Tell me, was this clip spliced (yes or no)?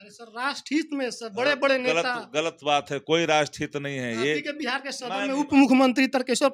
no